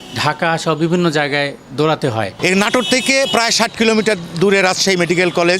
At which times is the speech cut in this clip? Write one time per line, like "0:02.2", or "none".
0:02.3